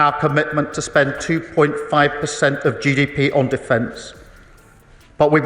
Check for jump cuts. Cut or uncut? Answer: uncut